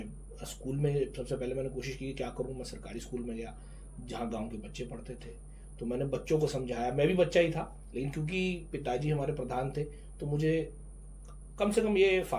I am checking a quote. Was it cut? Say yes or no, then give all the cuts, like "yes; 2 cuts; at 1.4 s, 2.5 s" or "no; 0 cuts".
no; 0 cuts